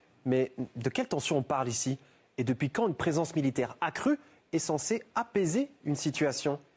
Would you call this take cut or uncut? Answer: cut